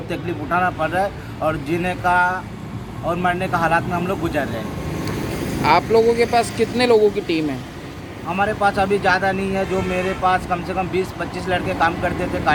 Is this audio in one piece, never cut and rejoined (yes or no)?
yes